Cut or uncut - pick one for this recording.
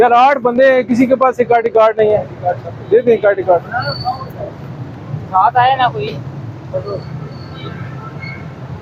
uncut